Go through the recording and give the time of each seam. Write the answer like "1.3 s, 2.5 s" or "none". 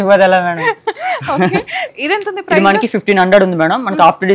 1.8 s